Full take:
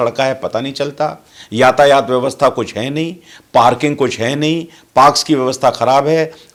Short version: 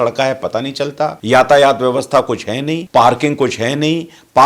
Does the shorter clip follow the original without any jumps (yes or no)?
no